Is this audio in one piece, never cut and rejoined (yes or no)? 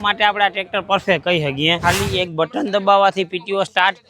no